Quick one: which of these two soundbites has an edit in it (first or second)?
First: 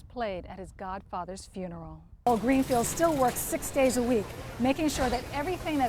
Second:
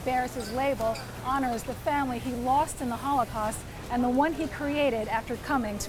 first